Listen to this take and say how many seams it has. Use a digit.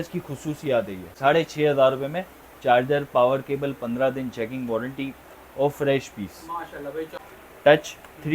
2